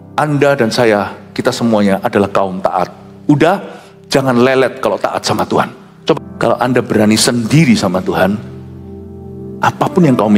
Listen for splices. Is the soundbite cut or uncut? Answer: cut